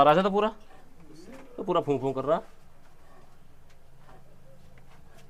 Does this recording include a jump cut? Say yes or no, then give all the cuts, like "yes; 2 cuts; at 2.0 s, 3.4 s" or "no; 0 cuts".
no; 0 cuts